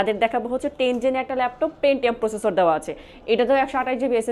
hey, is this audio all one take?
yes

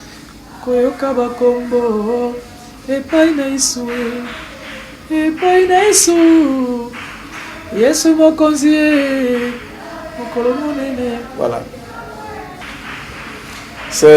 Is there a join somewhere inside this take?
yes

